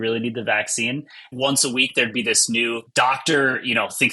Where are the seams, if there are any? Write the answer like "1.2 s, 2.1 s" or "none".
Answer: 1.3 s